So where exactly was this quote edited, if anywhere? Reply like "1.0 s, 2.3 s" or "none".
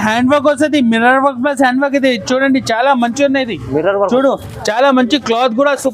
none